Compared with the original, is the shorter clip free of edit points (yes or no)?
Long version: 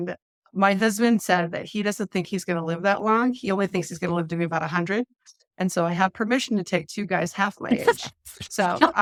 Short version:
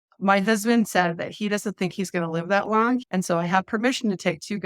no